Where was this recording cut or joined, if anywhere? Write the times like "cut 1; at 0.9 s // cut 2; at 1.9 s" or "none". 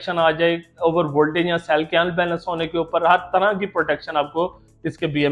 none